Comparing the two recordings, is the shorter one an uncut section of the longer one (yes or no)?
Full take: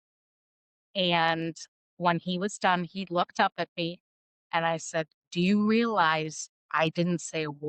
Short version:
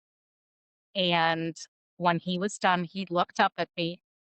yes